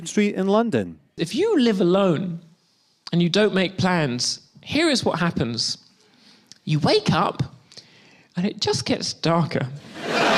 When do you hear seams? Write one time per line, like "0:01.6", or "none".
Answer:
none